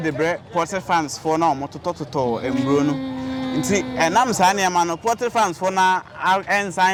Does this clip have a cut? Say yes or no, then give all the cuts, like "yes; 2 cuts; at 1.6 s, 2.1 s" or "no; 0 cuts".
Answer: no; 0 cuts